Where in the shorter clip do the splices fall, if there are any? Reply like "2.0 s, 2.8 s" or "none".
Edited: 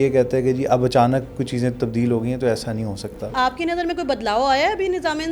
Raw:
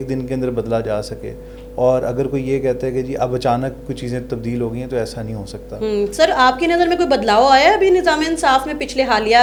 3.3 s